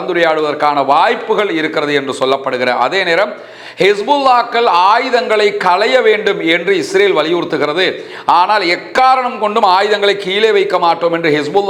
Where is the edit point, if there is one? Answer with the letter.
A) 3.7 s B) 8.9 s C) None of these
C